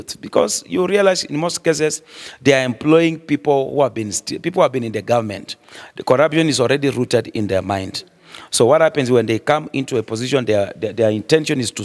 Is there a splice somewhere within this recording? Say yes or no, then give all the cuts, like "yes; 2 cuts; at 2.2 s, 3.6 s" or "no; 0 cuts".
no; 0 cuts